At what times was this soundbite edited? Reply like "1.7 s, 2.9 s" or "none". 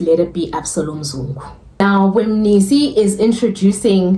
none